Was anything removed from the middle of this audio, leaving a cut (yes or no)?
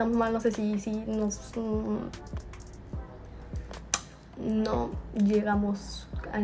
no